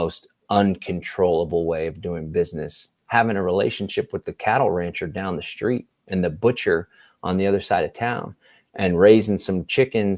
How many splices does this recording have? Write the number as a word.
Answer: zero